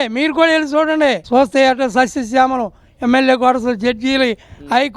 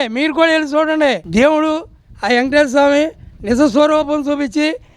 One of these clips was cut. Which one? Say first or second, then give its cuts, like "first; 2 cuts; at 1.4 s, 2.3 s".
second; 1 cut; at 1.2 s